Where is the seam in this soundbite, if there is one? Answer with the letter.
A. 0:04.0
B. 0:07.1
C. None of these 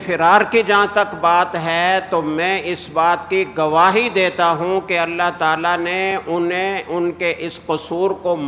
C